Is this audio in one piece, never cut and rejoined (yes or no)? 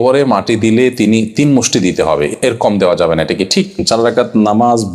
no